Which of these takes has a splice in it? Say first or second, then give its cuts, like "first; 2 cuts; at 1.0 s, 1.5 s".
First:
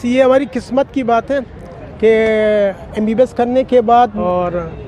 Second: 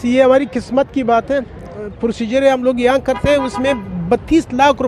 second; 1 cut; at 1.8 s